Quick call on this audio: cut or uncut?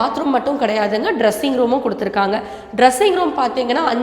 uncut